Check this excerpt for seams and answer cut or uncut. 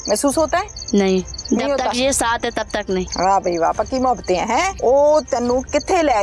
cut